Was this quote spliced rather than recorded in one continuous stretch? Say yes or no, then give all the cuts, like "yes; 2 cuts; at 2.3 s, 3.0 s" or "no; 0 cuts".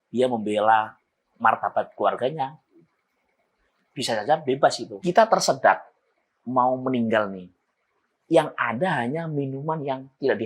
yes; 1 cut; at 4.9 s